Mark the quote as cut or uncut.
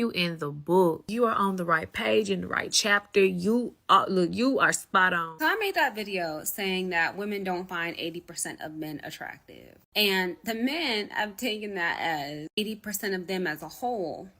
cut